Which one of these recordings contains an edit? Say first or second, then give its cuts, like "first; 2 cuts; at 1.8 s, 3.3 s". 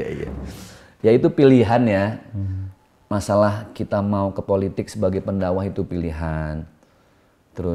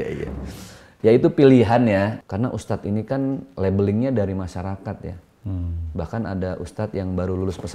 second; 1 cut; at 2.2 s